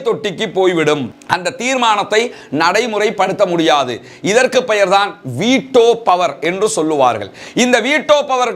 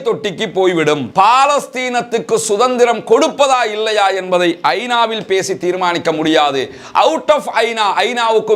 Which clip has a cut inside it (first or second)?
second